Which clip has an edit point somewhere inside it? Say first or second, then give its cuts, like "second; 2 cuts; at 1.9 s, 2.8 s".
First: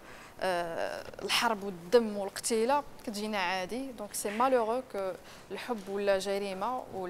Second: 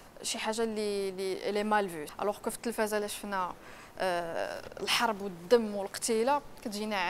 second; 1 cut; at 2.0 s